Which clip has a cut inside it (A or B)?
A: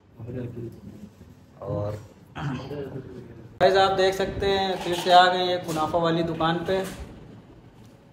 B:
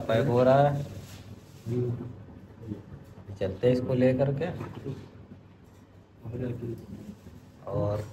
A